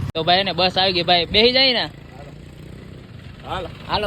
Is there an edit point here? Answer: no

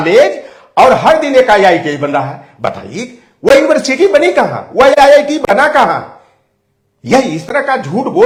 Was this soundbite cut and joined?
no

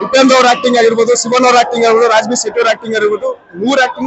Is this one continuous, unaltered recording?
yes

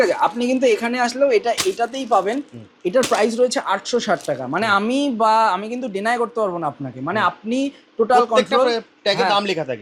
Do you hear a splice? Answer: no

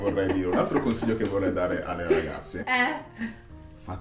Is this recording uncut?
yes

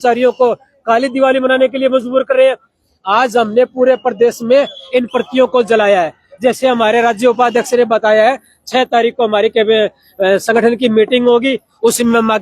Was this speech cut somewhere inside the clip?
no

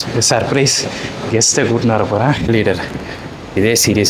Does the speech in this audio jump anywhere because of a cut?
yes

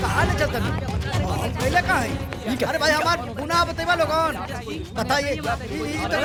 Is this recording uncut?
yes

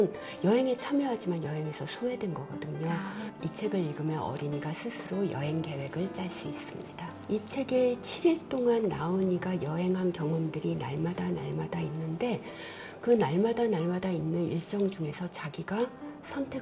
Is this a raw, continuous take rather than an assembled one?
no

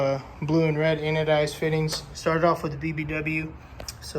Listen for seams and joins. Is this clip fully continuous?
no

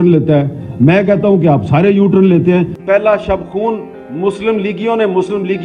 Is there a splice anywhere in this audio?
yes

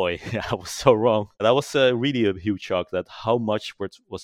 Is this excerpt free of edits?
no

